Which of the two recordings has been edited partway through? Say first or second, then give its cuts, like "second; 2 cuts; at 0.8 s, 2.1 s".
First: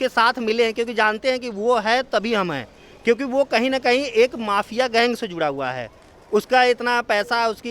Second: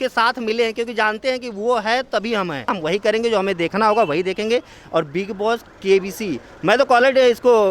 second; 1 cut; at 2.7 s